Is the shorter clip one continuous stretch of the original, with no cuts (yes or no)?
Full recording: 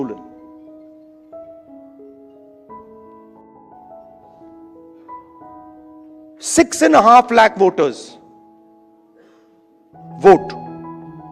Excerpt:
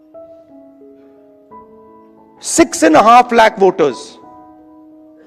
no